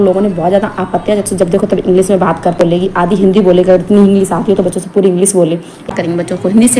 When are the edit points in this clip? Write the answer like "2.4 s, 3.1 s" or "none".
1.3 s, 2.6 s, 5.9 s